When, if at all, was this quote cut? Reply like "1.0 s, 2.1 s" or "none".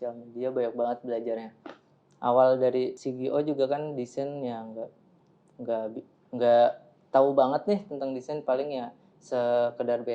3.0 s